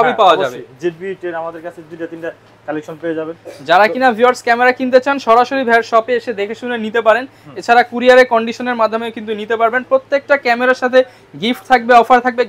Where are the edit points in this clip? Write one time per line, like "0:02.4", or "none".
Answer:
none